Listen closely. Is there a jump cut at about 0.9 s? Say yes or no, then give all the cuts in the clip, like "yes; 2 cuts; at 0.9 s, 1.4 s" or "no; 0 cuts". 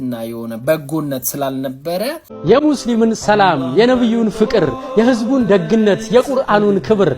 no; 1 cut; at 2.3 s